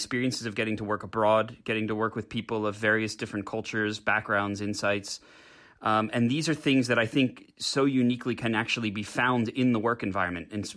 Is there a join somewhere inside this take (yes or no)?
no